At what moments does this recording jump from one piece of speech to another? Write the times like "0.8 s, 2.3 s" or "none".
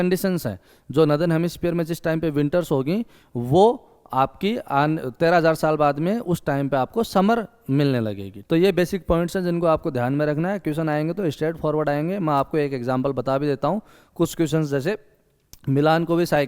8.3 s